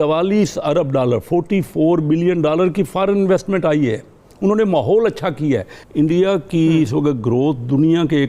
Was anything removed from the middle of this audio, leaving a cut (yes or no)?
yes